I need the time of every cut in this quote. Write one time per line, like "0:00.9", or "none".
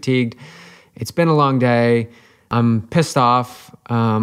0:02.5